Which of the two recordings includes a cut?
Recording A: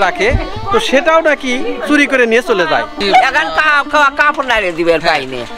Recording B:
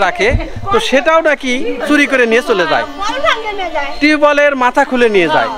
A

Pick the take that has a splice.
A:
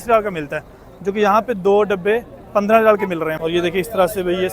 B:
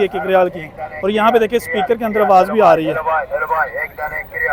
A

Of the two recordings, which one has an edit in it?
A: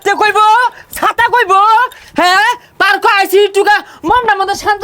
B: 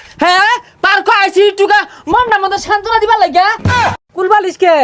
B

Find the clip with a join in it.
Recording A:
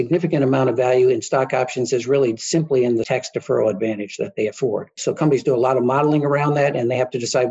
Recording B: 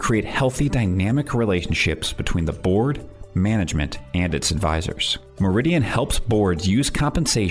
A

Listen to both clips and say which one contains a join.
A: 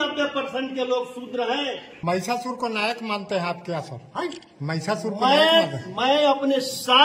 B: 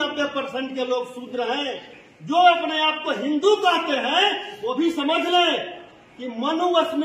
A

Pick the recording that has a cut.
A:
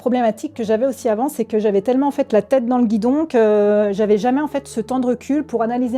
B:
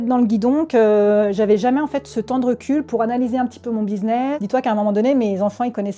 B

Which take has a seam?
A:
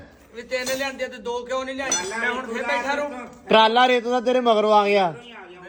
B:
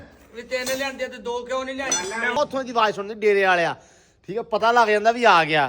B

